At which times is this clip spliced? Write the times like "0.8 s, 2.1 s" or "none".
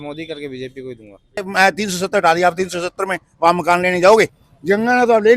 1.5 s, 4.5 s